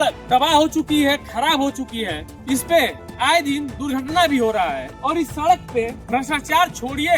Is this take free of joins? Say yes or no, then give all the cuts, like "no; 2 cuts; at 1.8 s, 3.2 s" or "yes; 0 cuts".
yes; 0 cuts